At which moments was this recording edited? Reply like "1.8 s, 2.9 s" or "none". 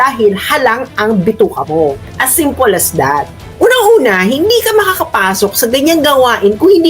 3.4 s